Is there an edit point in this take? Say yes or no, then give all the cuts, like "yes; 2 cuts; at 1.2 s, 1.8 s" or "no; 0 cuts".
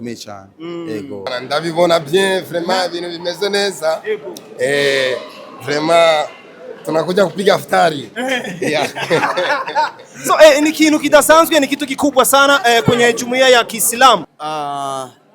yes; 2 cuts; at 1.4 s, 14.4 s